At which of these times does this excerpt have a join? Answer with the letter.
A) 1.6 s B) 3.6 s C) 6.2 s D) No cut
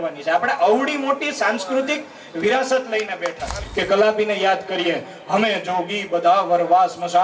B